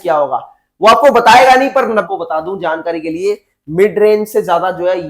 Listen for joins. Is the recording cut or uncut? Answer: cut